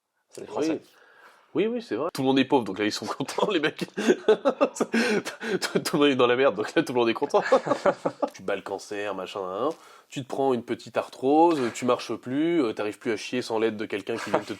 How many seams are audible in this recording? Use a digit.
2